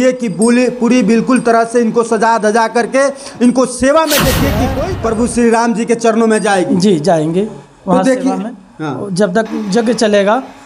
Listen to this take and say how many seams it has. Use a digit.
1